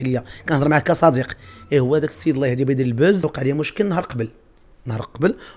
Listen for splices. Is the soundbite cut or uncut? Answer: cut